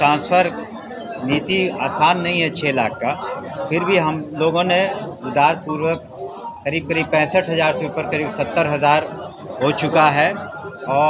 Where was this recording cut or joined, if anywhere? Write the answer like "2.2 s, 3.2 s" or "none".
none